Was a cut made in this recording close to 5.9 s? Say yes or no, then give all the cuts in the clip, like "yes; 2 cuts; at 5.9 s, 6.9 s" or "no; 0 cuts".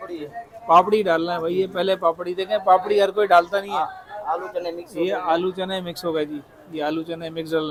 no; 0 cuts